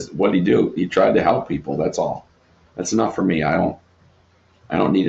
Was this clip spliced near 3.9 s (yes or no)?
no